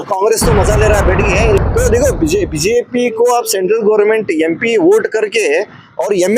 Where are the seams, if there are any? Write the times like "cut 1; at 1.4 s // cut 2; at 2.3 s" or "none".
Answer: cut 1; at 1.6 s